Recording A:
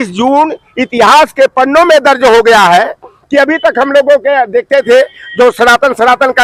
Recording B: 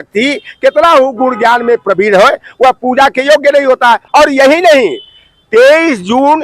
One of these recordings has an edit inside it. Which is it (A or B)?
B